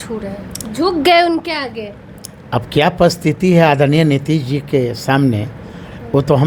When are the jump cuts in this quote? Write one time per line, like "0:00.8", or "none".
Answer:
none